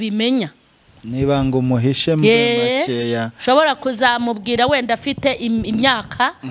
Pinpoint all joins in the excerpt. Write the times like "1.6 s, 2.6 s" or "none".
none